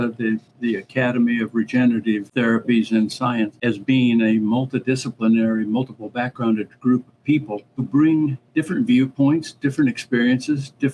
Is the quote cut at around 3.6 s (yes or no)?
yes